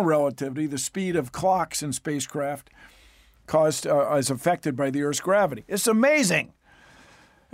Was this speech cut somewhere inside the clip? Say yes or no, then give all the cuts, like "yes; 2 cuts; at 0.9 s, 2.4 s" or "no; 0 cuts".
no; 0 cuts